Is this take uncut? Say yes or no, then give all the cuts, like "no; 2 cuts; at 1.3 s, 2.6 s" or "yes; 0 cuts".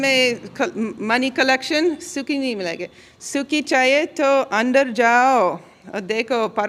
yes; 0 cuts